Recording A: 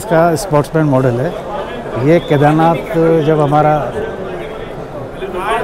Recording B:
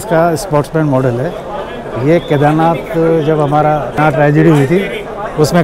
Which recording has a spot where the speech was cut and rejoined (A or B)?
B